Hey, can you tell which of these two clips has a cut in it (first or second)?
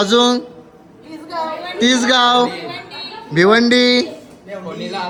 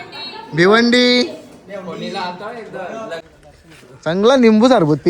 second